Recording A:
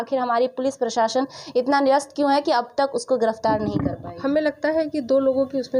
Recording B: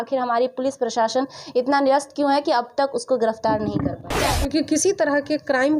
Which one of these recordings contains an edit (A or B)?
B